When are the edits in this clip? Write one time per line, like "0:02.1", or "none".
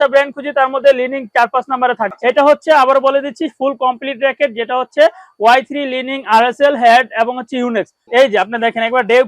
0:02.1
0:08.0